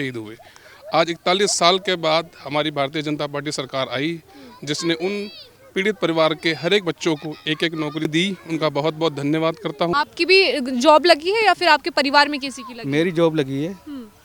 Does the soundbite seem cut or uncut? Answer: cut